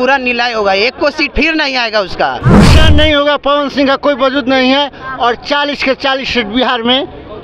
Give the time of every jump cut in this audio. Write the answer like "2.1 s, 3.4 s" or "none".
2.6 s

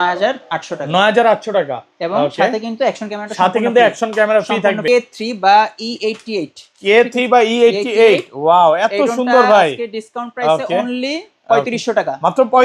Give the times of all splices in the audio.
4.8 s

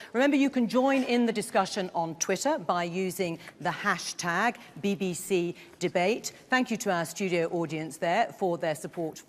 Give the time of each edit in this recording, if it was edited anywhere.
2.2 s

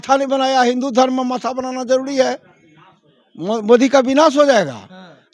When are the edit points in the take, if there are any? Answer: none

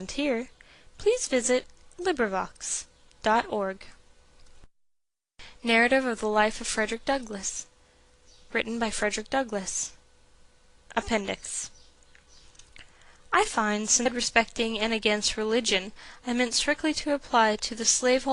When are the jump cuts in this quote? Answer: none

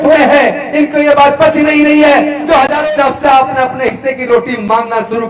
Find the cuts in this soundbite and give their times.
2.8 s

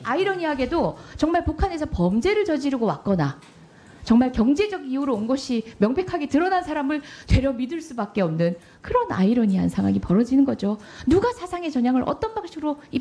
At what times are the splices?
none

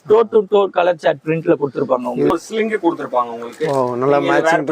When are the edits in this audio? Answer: 2.3 s

